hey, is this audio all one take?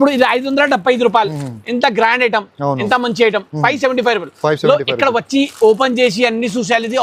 yes; 0 cuts

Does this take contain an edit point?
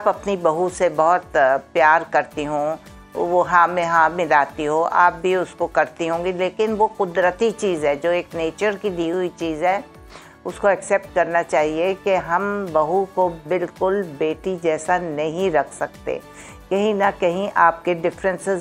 no; 0 cuts

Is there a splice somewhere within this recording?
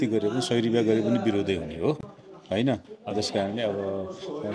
no; 0 cuts

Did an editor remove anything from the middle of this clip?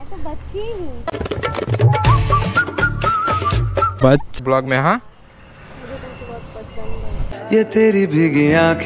yes; 1 cut; at 4.4 s

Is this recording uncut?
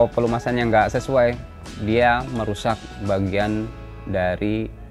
yes; 0 cuts

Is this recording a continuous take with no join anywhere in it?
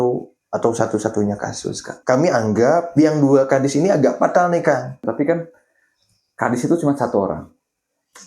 no; 2 cuts; at 2.0 s, 5.0 s

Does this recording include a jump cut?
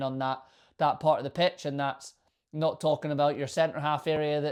no; 0 cuts

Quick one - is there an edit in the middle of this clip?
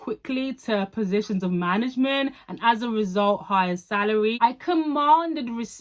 yes; 1 cut; at 4.4 s

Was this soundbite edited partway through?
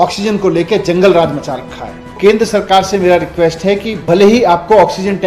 yes; 1 cut; at 2.1 s

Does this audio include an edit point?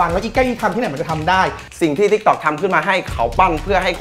yes; 1 cut; at 1.6 s

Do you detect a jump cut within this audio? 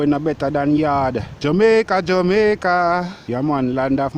yes; 1 cut; at 1.3 s

